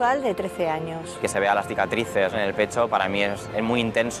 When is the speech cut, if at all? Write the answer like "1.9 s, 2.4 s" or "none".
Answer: 1.2 s, 2.3 s